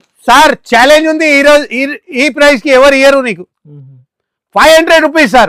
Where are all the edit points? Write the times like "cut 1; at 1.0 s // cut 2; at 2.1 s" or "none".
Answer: none